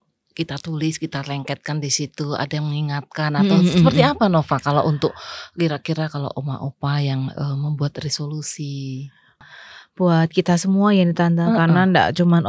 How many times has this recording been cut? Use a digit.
1